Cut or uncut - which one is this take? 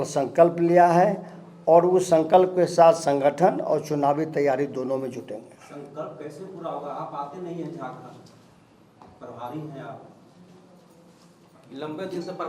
uncut